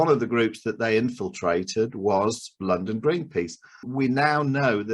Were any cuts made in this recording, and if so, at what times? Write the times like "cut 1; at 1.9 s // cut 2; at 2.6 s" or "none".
cut 1; at 3.9 s